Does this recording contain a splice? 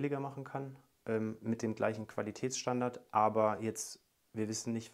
no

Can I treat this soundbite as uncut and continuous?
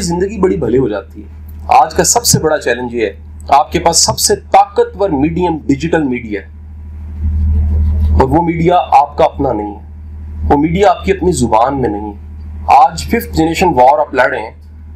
yes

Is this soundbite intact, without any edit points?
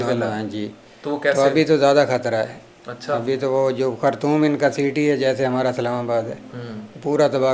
yes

